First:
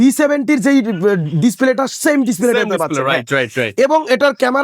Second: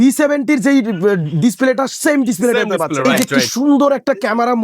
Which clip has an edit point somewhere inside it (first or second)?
second